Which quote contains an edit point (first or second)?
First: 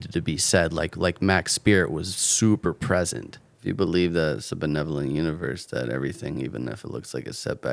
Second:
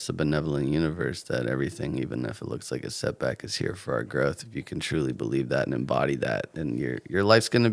first